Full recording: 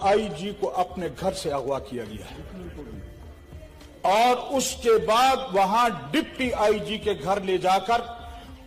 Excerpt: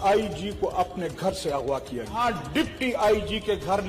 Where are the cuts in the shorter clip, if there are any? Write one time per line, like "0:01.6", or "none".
0:02.2